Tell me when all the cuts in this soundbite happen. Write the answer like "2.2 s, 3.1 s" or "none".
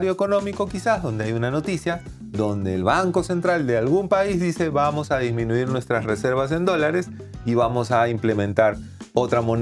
none